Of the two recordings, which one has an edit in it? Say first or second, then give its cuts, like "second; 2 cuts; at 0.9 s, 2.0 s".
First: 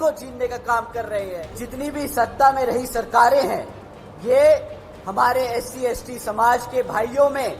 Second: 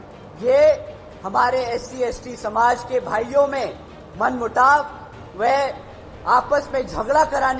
first; 1 cut; at 1.6 s